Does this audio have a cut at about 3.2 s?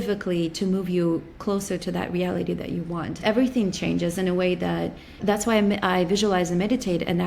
yes; 2 cuts; at 3.2 s, 5.2 s

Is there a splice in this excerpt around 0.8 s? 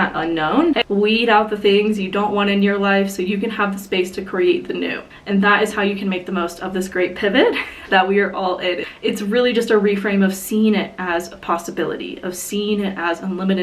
yes; 3 cuts; at 0.8 s, 5.1 s, 8.9 s

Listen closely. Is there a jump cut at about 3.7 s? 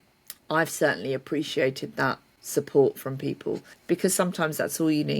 yes; 2 cuts; at 2.3 s, 3.7 s

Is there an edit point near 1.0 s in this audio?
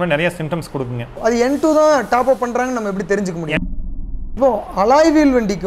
yes; 2 cuts; at 1.0 s, 3.7 s

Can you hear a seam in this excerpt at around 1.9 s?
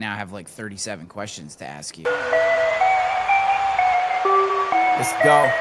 yes; 1 cut; at 1.9 s

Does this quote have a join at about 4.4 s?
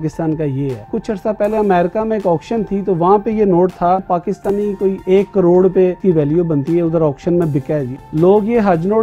yes; 4 cuts; at 0.8 s, 4.4 s, 6.0 s, 7.9 s

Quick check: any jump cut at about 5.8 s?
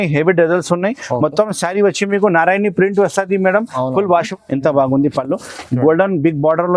no; 1 cut; at 4.3 s

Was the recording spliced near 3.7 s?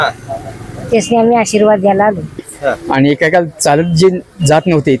no; 1 cut; at 2.5 s

